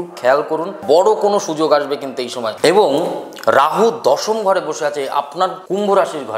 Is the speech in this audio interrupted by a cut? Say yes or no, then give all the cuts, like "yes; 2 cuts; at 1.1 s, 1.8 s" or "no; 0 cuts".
no; 0 cuts